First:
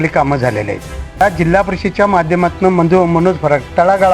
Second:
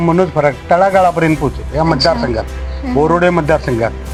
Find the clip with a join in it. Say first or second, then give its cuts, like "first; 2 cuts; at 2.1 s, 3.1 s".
first; 1 cut; at 1.2 s